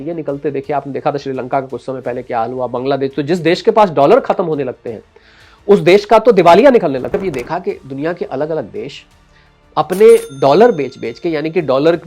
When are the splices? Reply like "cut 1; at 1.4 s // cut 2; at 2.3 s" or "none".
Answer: cut 1; at 7.1 s